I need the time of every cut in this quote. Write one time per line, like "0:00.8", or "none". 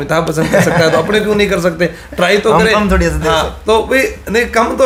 none